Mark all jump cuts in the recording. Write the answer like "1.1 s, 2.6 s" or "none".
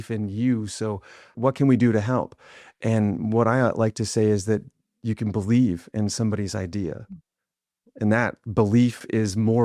1.4 s